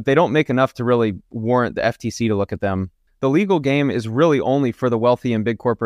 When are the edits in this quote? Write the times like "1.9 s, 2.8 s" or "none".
3.0 s